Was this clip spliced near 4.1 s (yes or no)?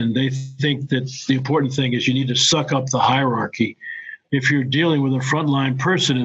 yes